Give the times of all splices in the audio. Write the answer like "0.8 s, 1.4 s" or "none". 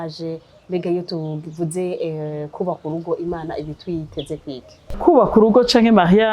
5.0 s